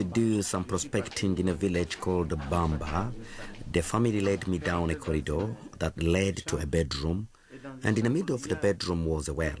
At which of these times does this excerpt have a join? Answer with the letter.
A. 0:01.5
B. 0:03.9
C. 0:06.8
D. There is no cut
B